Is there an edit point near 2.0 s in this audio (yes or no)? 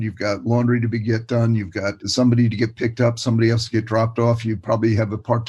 yes